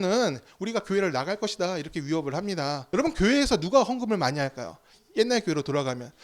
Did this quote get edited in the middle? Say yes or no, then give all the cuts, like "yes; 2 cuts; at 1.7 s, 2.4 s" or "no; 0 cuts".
yes; 1 cut; at 2.8 s